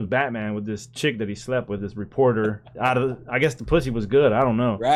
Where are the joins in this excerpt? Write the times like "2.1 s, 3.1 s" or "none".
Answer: none